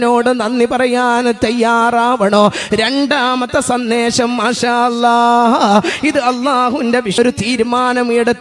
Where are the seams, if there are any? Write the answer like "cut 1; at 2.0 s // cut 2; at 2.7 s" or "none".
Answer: cut 1; at 7.2 s